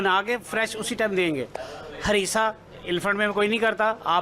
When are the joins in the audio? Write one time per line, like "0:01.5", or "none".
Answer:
0:01.7